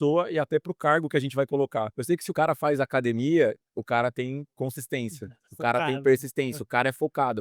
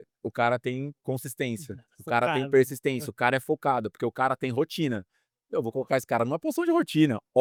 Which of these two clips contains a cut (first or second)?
first